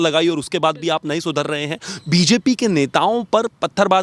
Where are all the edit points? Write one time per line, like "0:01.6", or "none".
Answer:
none